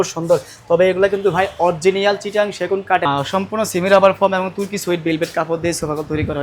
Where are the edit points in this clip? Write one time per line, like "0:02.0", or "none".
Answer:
0:03.1